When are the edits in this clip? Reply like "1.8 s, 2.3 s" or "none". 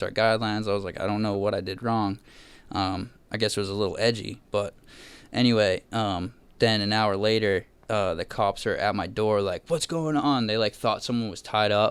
none

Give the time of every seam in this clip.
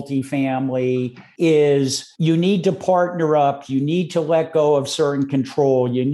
1.2 s, 2.0 s

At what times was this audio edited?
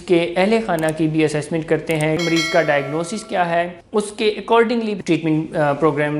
2.2 s, 3.8 s, 4.9 s

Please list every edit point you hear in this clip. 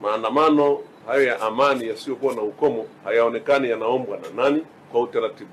0.9 s

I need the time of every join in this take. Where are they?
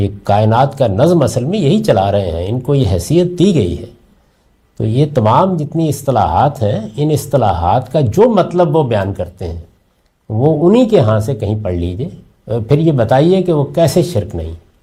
none

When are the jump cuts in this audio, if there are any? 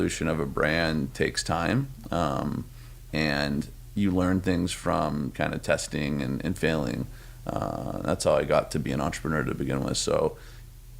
none

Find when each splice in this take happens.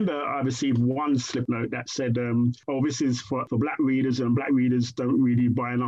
1.4 s

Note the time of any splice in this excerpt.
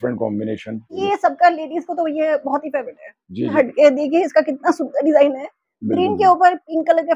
1.0 s, 3.5 s

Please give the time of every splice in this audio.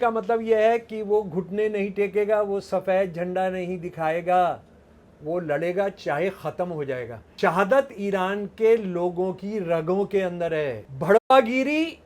7.2 s, 10.9 s

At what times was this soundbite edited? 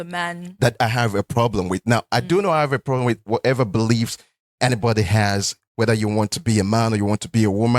none

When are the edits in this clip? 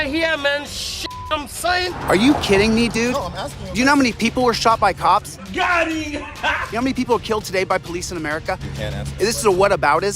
6.6 s

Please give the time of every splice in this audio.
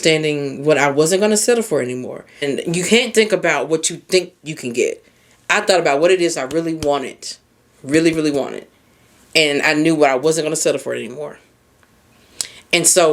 2.4 s

